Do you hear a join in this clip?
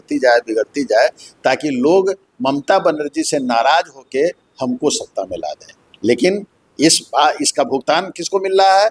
no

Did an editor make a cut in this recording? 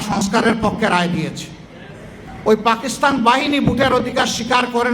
yes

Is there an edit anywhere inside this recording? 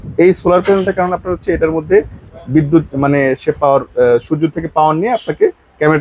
no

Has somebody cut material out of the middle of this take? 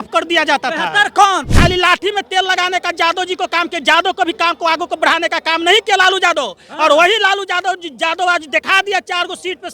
yes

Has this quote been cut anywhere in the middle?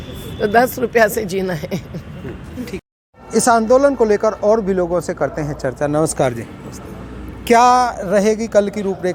no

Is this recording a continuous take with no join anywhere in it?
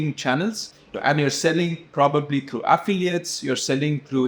yes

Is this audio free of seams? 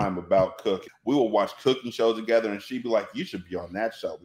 no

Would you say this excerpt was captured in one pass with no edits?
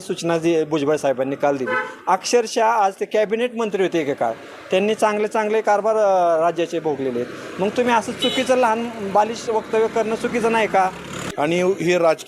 no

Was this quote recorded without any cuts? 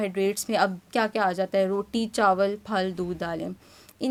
yes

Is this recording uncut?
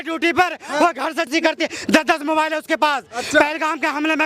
no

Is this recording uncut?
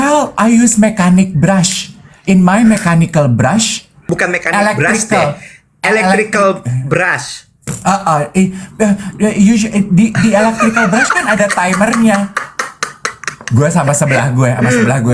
no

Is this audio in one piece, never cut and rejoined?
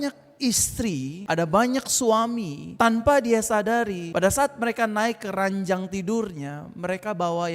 no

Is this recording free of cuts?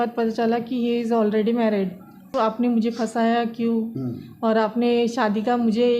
no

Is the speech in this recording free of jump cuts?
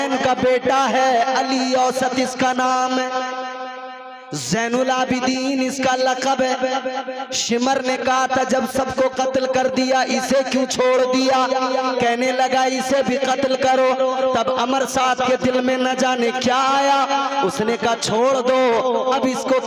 yes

